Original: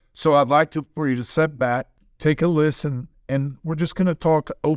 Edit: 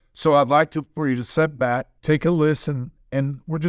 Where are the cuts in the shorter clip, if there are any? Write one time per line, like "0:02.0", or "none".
0:01.9